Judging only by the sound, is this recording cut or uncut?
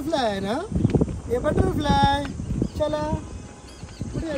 uncut